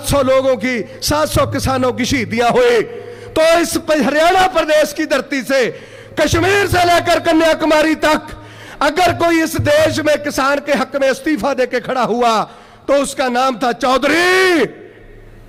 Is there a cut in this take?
no; 0 cuts

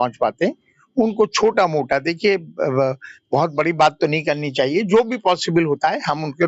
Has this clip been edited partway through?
no; 0 cuts

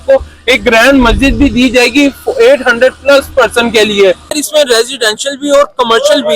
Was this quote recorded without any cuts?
no; 1 cut; at 4.3 s

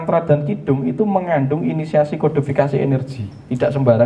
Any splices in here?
no; 0 cuts

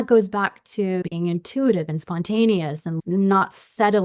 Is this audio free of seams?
no; 1 cut; at 1.0 s

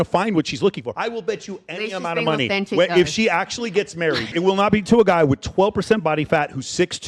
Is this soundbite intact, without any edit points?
no; 2 cuts; at 0.9 s, 4.3 s

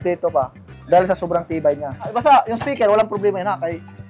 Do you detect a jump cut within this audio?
yes; 1 cut; at 2.1 s

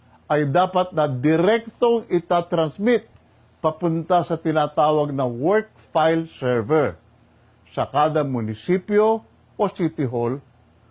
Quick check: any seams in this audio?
yes; 1 cut; at 8.3 s

